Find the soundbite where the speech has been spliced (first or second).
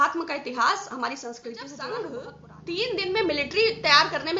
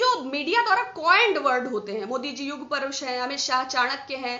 first